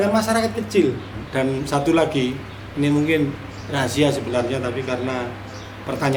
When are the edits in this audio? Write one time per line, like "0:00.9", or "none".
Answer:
0:01.2